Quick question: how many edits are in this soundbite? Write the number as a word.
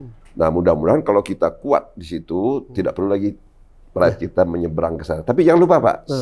zero